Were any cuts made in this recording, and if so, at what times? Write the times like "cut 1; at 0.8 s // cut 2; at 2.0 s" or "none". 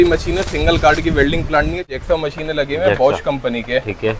cut 1; at 1.9 s